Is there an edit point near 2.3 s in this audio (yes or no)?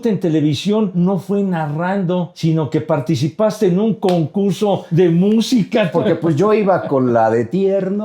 yes